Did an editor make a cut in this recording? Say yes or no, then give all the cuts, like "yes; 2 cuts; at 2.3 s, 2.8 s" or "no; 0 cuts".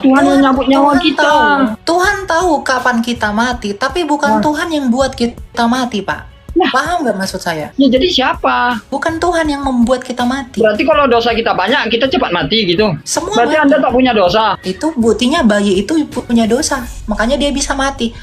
yes; 5 cuts; at 1.8 s, 7.6 s, 8.9 s, 13.0 s, 14.7 s